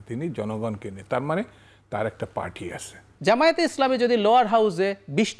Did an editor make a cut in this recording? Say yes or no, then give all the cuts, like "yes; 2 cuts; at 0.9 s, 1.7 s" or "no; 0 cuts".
yes; 1 cut; at 3.1 s